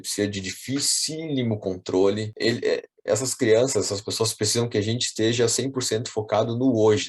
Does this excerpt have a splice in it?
yes; 1 cut; at 2.3 s

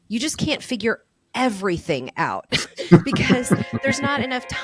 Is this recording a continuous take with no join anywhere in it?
yes; 0 cuts

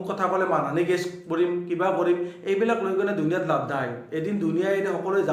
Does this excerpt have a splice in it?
no; 0 cuts

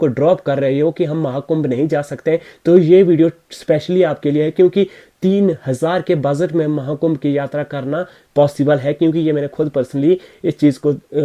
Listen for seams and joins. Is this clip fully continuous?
yes; 0 cuts

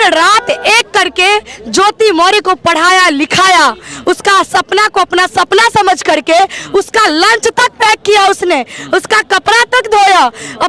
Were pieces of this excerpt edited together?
no; 0 cuts

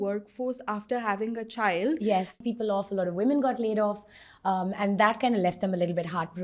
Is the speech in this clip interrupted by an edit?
yes; 1 cut; at 2.4 s

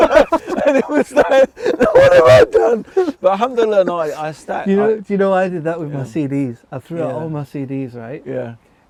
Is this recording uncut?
yes; 0 cuts

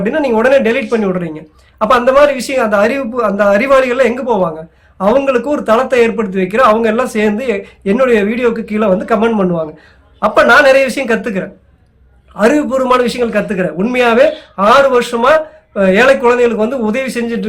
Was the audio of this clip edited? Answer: no; 0 cuts

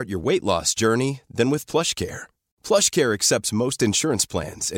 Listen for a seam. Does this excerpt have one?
no; 0 cuts

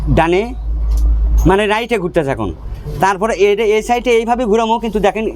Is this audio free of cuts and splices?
yes; 0 cuts

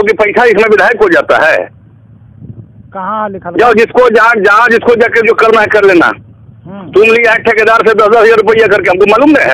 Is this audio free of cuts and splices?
yes; 0 cuts

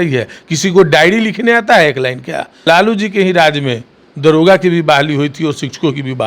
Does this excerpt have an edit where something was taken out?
yes; 1 cut; at 2.6 s

